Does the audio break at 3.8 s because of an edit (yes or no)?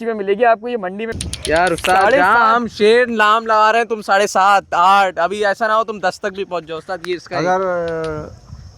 no